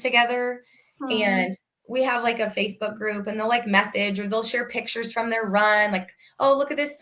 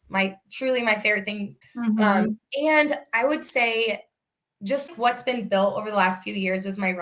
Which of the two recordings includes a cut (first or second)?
second